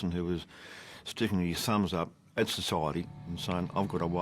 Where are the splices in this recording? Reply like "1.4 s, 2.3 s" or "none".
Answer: 3.1 s